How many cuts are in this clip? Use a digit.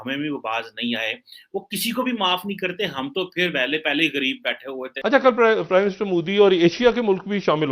1